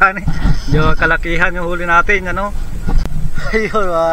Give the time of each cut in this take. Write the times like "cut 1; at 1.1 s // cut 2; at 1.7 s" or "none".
cut 1; at 3.1 s